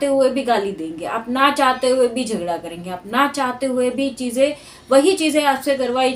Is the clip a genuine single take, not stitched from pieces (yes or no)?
yes